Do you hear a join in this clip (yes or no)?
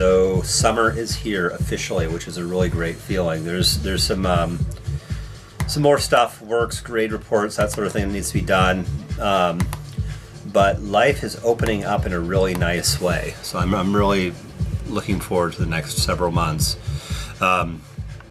no